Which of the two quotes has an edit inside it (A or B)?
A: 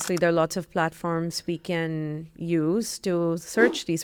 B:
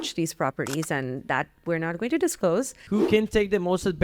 B